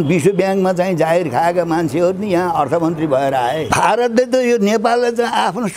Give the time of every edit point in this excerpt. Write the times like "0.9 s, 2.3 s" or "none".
3.6 s